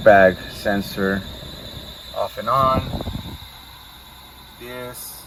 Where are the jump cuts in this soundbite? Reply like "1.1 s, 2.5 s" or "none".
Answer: none